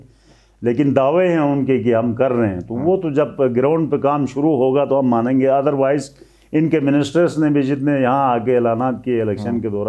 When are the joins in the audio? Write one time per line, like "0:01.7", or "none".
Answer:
none

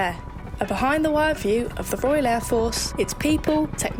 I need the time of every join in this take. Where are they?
none

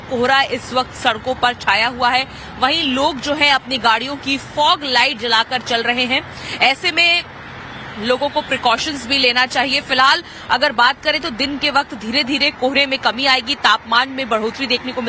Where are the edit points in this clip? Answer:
0:11.9

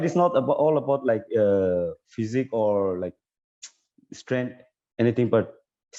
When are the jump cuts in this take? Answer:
none

